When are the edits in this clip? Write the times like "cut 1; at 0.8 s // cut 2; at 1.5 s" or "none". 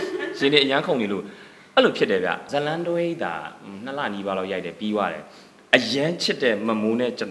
cut 1; at 2.4 s

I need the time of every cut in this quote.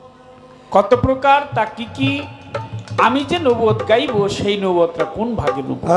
none

